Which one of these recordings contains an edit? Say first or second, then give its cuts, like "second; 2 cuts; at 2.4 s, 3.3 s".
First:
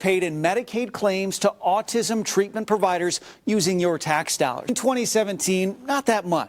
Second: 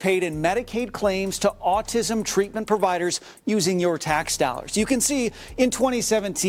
first; 1 cut; at 4.7 s